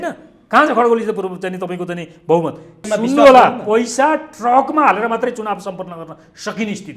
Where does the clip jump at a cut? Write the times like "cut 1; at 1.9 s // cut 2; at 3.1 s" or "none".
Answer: cut 1; at 2.9 s

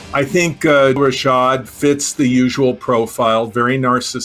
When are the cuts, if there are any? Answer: cut 1; at 1.0 s

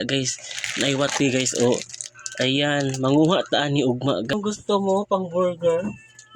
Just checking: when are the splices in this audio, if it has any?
cut 1; at 4.3 s

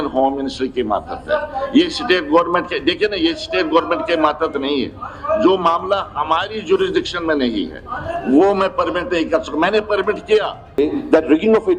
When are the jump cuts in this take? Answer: cut 1; at 10.8 s

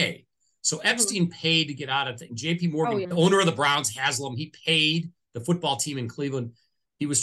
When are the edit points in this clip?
cut 1; at 3.1 s

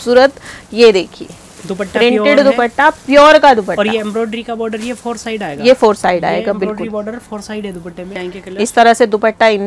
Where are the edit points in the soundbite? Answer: cut 1; at 8.2 s

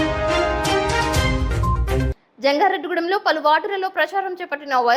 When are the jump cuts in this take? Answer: cut 1; at 1.4 s

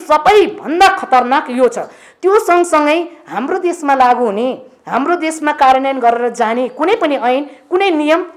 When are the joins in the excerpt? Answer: none

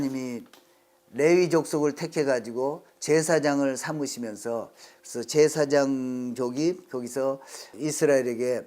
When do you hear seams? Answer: cut 1; at 7.7 s

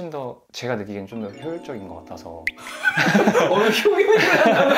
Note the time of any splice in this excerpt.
none

